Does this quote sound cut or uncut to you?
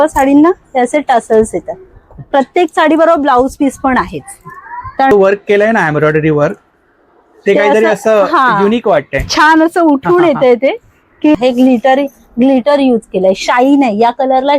cut